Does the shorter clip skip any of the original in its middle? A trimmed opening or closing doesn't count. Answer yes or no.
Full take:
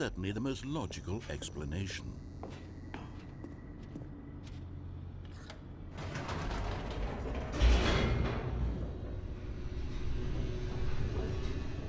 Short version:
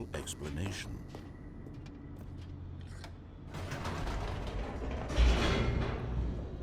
yes